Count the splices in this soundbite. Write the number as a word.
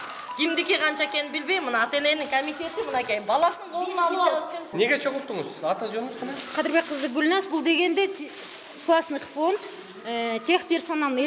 one